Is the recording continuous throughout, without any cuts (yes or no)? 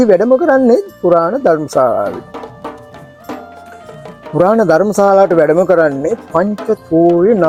yes